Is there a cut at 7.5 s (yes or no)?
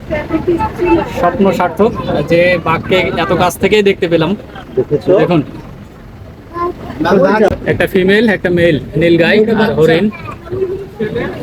yes